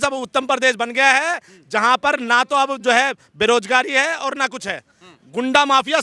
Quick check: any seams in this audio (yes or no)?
no